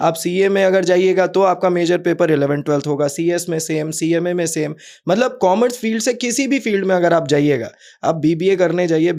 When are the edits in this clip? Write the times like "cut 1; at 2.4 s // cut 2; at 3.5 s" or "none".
none